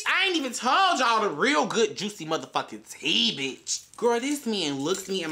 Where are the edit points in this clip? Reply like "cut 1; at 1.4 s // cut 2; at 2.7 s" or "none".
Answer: cut 1; at 3.7 s